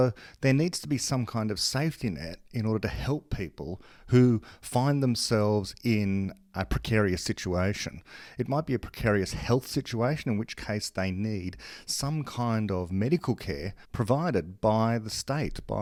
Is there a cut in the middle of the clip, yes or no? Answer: no